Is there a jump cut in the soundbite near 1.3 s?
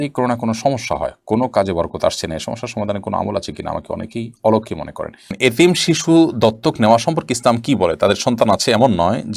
no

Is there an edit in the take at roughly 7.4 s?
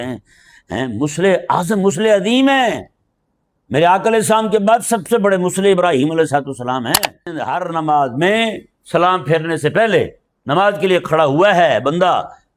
yes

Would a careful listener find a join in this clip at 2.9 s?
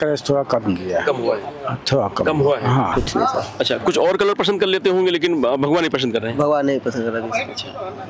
yes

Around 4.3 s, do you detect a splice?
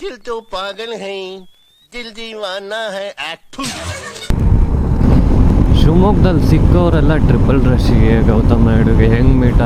yes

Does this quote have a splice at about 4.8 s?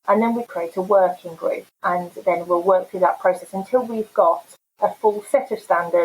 no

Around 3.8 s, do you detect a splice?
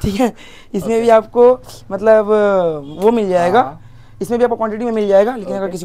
no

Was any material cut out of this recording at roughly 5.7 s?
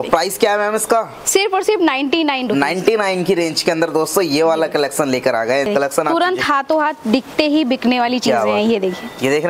yes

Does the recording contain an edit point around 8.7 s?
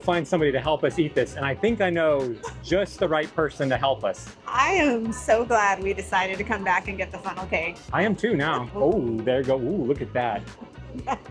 yes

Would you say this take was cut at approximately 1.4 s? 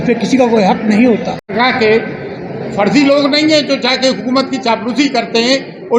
yes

